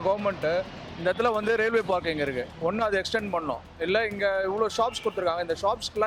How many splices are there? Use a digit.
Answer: 0